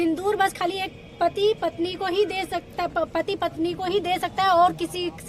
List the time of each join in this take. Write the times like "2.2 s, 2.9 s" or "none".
none